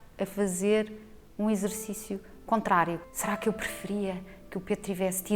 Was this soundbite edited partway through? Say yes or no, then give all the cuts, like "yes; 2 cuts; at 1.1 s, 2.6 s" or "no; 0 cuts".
yes; 1 cut; at 3.0 s